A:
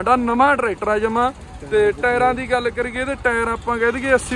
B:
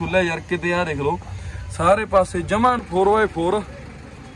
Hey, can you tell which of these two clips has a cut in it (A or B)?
B